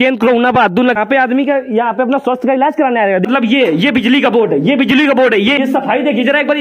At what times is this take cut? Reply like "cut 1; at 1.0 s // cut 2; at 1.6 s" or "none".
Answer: cut 1; at 1.0 s // cut 2; at 3.2 s // cut 3; at 5.6 s